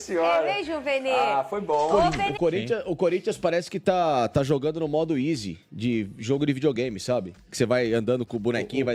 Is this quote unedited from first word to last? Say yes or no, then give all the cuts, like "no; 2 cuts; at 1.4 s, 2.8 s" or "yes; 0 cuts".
no; 1 cut; at 2.2 s